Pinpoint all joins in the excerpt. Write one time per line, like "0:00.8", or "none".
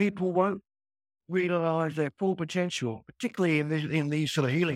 none